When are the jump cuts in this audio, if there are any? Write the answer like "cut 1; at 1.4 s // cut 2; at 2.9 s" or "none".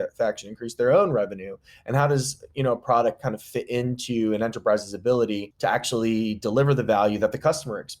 cut 1; at 5.5 s